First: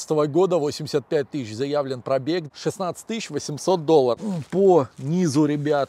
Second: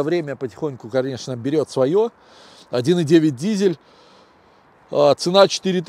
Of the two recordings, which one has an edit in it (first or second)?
first